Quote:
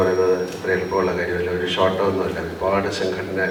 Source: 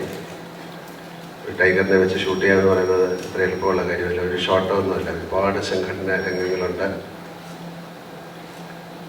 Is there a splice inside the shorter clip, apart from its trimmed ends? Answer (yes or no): no